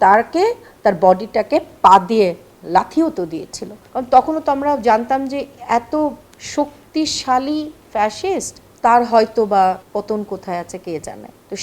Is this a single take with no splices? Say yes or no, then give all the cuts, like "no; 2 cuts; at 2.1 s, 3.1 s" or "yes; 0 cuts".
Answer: no; 1 cut; at 3.8 s